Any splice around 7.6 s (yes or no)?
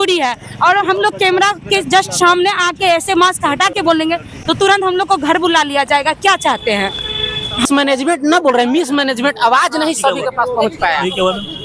yes